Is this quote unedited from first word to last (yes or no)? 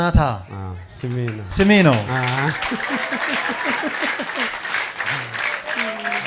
yes